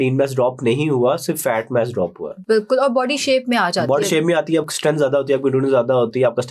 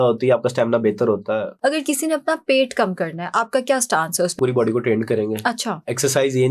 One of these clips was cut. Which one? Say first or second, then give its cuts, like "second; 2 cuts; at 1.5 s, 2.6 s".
second; 2 cuts; at 1.5 s, 4.4 s